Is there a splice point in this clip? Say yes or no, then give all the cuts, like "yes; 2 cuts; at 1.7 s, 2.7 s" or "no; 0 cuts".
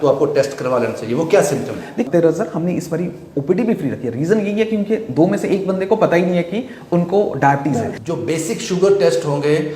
yes; 2 cuts; at 2.1 s, 8.0 s